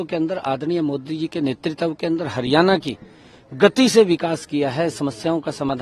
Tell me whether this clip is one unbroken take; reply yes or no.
yes